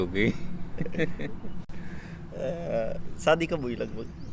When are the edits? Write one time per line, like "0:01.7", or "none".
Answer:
none